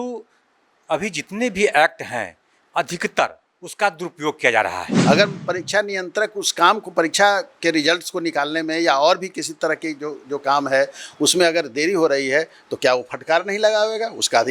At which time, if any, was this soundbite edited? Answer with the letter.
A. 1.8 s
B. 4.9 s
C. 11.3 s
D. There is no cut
B